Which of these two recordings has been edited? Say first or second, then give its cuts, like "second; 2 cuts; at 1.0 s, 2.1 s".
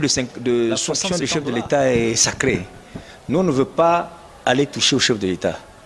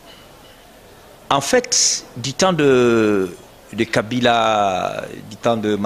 first; 1 cut; at 1.0 s